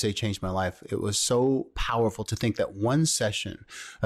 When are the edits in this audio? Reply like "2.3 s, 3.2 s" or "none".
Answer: none